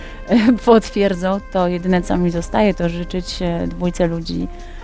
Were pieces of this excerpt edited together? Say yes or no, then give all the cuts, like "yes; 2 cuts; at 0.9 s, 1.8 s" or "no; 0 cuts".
no; 0 cuts